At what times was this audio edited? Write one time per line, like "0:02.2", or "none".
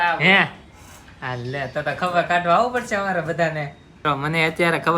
0:04.0